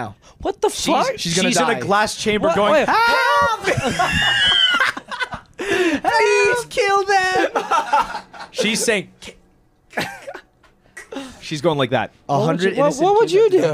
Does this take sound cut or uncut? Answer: uncut